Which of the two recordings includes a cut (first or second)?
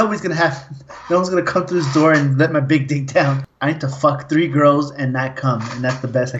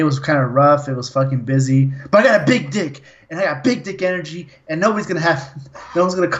first